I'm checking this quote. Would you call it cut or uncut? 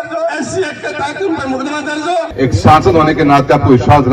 cut